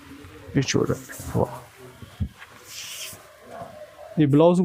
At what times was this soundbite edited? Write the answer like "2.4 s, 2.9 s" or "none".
none